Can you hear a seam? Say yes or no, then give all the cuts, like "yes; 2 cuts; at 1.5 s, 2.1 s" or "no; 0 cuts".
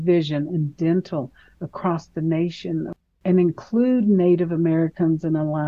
yes; 1 cut; at 3.0 s